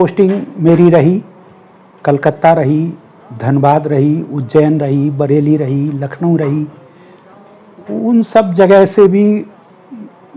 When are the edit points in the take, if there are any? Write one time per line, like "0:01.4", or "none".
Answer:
none